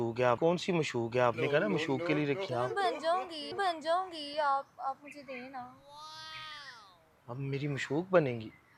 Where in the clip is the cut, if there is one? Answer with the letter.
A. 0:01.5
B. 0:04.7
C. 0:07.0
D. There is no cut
D